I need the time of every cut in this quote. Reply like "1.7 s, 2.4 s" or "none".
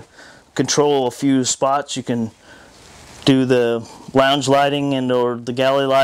2.8 s